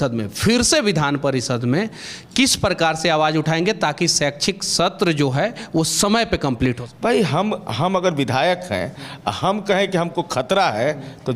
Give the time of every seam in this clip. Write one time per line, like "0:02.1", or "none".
0:06.9

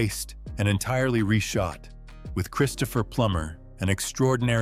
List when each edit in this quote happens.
none

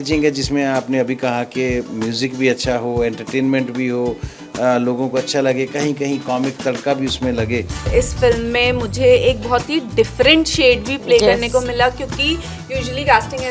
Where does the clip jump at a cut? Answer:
0:07.9

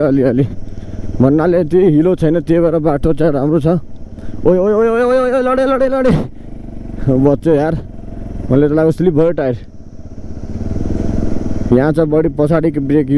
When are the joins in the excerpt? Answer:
none

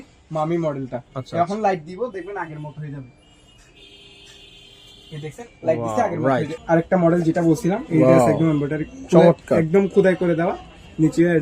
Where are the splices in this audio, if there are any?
0:06.6

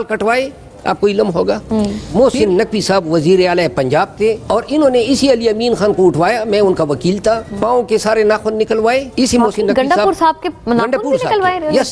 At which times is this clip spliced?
0:02.0
0:04.4
0:07.5
0:09.1

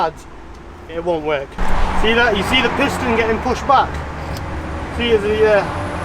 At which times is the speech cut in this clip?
0:01.5

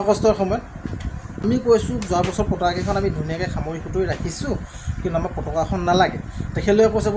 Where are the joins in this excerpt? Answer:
0:01.3

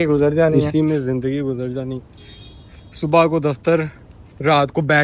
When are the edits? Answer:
none

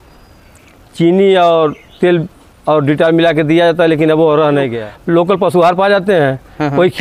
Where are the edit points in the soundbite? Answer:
0:04.8

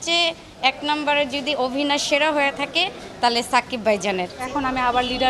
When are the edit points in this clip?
0:04.4

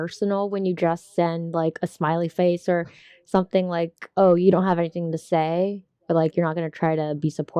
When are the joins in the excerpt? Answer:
none

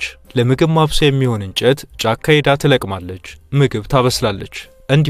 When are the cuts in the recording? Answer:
none

